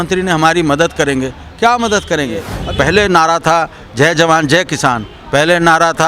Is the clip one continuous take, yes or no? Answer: no